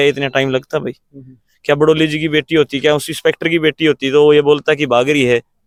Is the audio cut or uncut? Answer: uncut